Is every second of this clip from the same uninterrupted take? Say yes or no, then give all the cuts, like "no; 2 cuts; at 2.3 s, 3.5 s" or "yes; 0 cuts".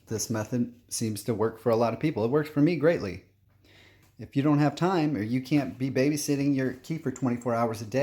yes; 0 cuts